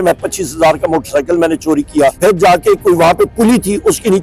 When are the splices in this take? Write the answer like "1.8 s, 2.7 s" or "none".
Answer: 2.2 s